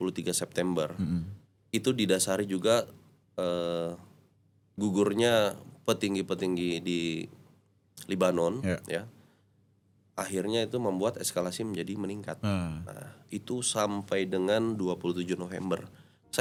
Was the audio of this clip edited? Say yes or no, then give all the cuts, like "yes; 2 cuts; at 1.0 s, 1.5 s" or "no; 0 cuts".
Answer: no; 0 cuts